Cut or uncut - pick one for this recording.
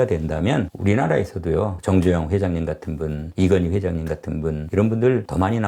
uncut